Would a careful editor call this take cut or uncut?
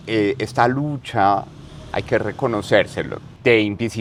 uncut